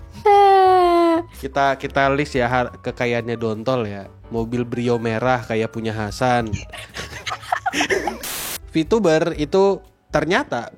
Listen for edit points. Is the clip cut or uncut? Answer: cut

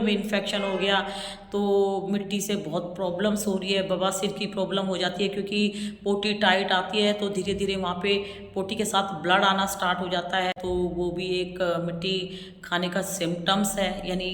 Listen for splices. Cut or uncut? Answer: cut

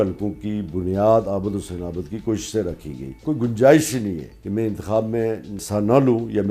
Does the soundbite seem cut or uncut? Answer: cut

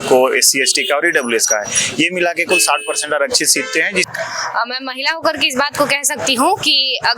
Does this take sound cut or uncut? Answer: cut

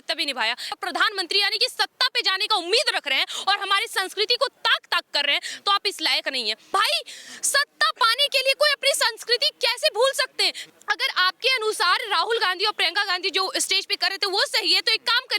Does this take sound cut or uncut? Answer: cut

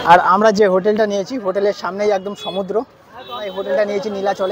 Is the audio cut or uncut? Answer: cut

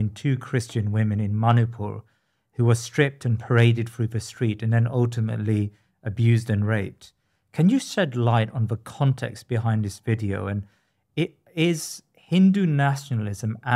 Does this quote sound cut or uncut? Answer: uncut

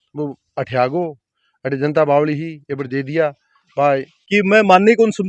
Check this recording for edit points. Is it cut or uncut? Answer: cut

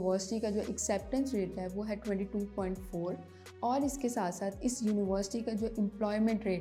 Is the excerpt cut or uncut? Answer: uncut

